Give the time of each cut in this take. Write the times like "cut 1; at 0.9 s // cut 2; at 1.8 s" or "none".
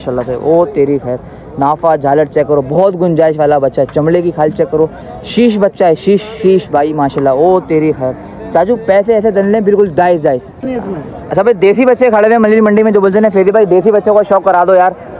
cut 1; at 10.6 s